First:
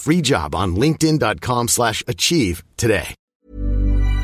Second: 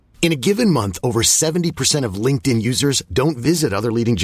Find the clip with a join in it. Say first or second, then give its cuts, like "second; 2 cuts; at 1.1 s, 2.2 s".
first; 1 cut; at 3.2 s